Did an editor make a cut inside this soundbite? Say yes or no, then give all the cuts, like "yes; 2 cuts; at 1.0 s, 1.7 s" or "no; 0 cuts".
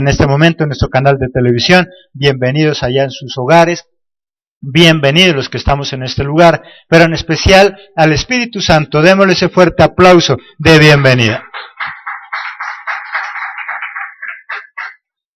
no; 0 cuts